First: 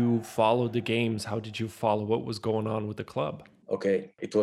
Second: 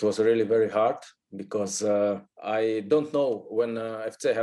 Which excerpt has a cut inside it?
second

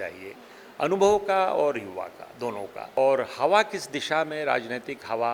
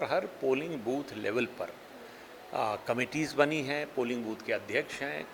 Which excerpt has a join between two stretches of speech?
first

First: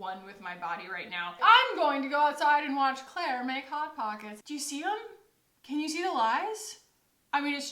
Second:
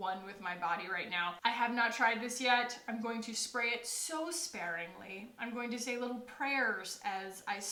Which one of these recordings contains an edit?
first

